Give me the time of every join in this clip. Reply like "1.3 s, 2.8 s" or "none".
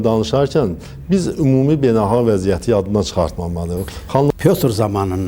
4.3 s